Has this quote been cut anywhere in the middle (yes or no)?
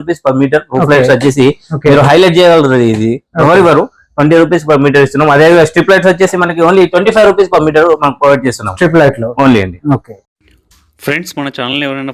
no